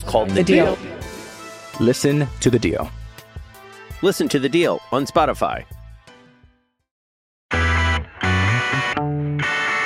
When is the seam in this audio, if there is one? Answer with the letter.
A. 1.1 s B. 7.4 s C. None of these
B